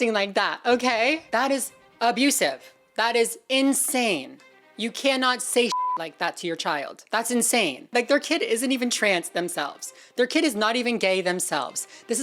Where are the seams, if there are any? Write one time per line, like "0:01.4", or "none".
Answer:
none